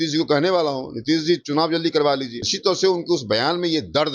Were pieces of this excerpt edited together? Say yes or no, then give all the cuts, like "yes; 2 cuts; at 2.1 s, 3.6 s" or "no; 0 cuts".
yes; 1 cut; at 2.4 s